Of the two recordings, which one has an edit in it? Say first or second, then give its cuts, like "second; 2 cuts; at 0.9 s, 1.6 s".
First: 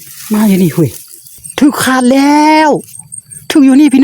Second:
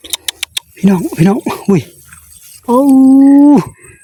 first; 1 cut; at 1.4 s